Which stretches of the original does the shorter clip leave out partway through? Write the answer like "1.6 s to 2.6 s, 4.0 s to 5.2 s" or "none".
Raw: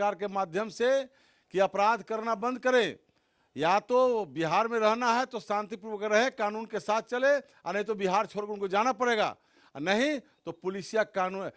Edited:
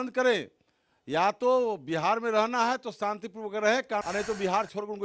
6.5 s to 7.7 s